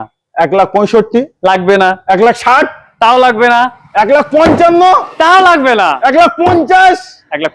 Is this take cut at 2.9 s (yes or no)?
no